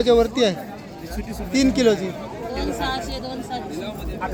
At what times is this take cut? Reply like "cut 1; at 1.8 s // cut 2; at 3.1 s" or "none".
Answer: none